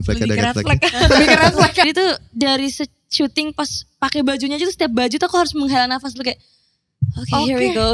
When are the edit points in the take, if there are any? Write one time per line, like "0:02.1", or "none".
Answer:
0:01.9